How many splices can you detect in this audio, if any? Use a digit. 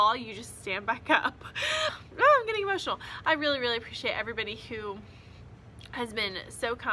1